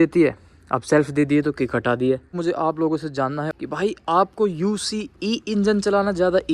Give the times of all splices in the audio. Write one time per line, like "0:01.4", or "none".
0:02.4
0:03.6